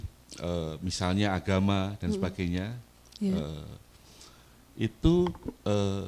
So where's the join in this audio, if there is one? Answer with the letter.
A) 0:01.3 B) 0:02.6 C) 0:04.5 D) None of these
D